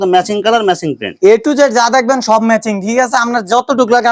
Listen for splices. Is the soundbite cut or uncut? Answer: uncut